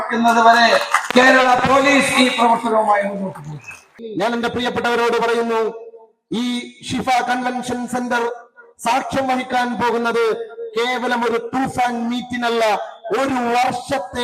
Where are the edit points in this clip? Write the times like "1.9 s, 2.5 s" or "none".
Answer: 3.9 s